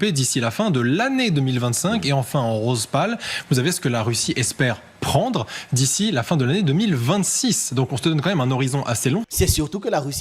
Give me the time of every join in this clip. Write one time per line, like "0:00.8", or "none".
0:09.3